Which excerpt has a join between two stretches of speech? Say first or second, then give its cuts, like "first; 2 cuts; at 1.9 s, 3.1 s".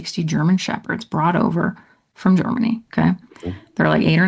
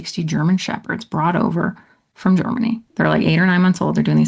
second; 1 cut; at 2.8 s